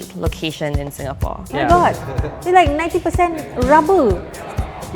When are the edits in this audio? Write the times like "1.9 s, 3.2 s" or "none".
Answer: 1.4 s

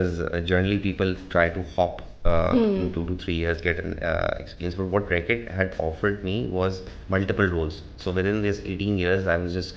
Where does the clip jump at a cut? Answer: 6.9 s

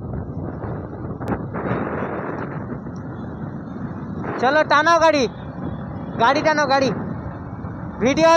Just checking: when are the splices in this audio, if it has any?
1.3 s

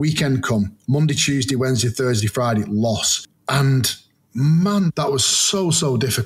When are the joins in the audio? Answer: 4.9 s

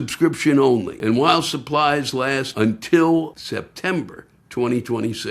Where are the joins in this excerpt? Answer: 0.9 s, 2.5 s, 3.4 s

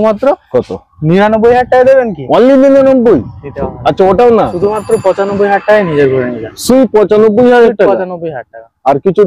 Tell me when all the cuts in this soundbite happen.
none

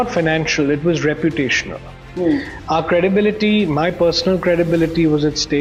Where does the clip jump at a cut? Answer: none

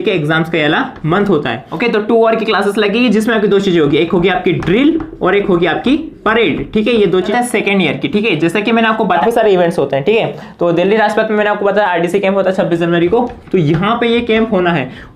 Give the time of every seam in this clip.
1.7 s, 7.2 s, 9.1 s

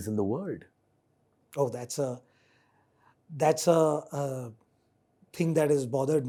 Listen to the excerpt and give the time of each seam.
none

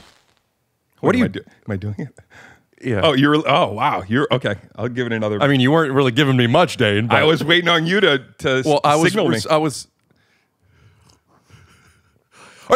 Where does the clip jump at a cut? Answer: none

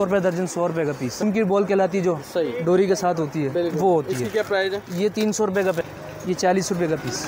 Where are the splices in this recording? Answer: 1.2 s, 5.9 s

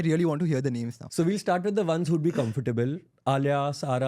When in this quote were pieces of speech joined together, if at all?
1.0 s

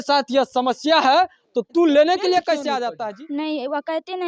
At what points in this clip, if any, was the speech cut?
2.9 s

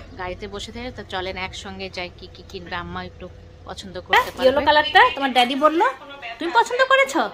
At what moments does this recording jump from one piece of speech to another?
4.1 s

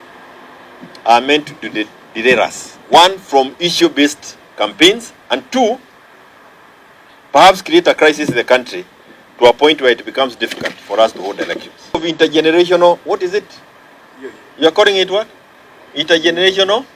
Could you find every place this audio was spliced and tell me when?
12.1 s

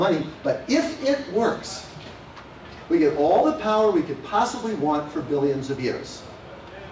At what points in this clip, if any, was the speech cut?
1.0 s

